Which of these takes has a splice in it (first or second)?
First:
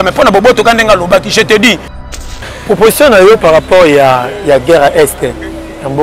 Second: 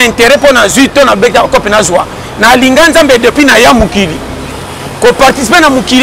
first